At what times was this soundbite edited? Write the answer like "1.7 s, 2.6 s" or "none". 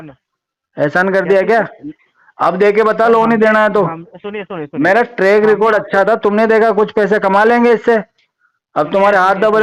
none